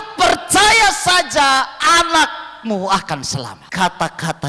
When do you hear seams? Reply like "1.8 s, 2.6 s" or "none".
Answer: 3.6 s